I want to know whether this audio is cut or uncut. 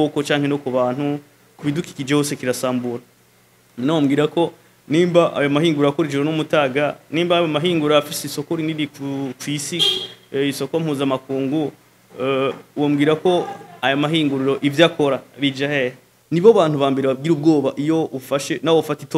cut